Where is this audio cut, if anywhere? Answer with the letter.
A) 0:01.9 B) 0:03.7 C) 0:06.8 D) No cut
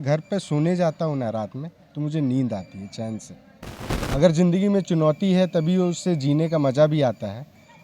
B